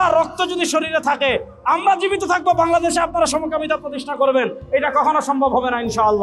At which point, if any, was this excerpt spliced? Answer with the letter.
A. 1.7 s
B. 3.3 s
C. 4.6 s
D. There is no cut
D